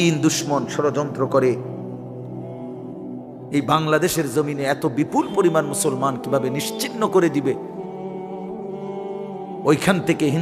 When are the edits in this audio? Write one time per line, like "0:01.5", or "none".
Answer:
none